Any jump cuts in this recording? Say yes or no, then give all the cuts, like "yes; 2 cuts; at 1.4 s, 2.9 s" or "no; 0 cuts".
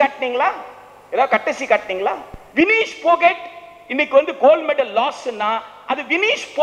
yes; 1 cut; at 2.3 s